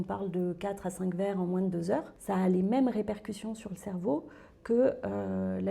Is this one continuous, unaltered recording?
no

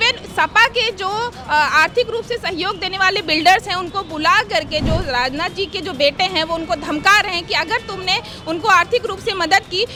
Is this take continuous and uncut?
yes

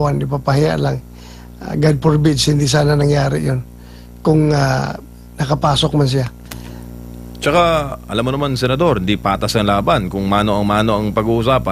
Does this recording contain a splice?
no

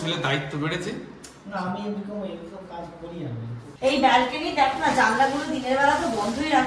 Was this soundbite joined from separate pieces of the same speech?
yes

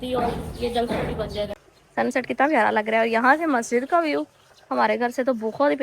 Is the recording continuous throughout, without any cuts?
no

